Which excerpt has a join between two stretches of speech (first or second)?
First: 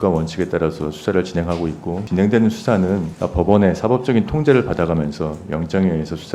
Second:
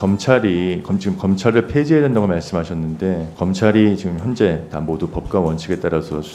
first